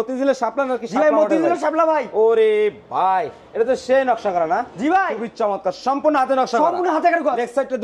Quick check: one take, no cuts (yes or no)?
yes